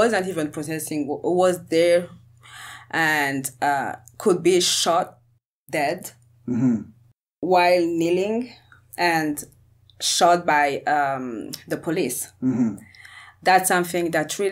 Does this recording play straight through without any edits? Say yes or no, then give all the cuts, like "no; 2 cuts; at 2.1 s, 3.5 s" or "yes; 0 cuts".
yes; 0 cuts